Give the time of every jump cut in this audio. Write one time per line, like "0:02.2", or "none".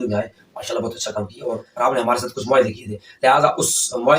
0:01.7

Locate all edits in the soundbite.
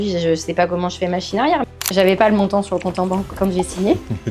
0:01.6

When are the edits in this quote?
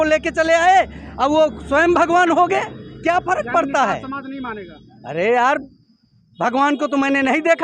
none

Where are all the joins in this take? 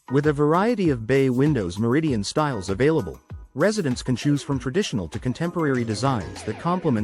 none

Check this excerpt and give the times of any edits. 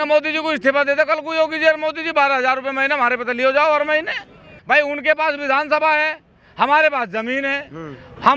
0:04.5

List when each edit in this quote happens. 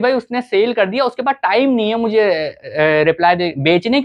none

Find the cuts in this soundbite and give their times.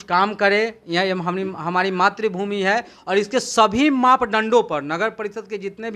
none

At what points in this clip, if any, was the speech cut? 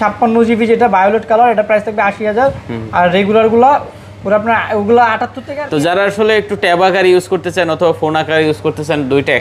0:05.4

